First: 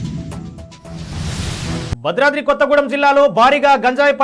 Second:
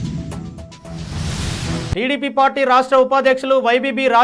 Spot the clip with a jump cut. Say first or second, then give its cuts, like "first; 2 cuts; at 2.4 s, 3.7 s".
second; 1 cut; at 1.9 s